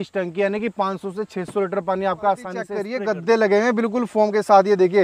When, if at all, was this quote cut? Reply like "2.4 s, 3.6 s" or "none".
2.8 s